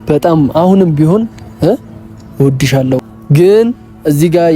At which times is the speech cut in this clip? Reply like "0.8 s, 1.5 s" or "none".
3.1 s